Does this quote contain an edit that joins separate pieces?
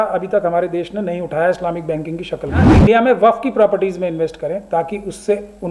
yes; 1 cut; at 2.8 s

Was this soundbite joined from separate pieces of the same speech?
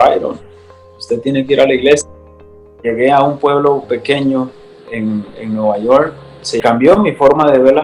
yes; 2 cuts; at 2.7 s, 6.6 s

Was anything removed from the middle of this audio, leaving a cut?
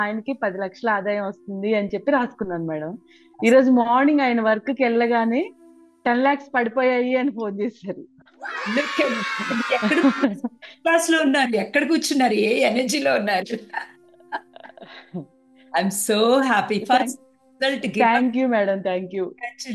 no; 0 cuts

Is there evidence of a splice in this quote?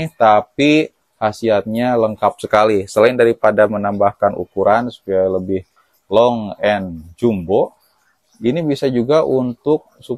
no; 0 cuts

